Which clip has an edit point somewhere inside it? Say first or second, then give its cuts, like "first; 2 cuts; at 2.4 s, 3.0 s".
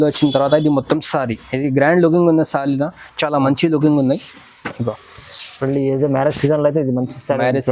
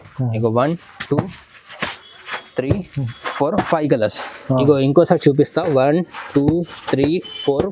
first; 1 cut; at 4.9 s